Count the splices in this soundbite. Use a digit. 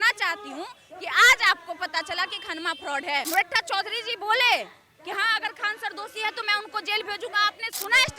1